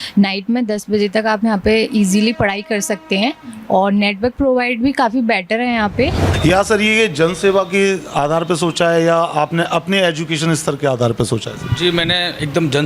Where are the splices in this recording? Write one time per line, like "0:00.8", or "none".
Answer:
0:06.2